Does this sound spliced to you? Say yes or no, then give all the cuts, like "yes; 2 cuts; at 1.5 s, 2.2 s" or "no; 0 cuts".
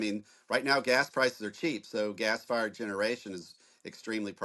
no; 0 cuts